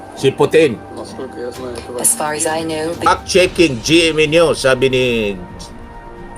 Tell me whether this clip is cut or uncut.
cut